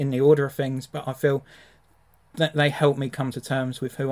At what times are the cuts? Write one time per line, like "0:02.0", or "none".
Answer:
none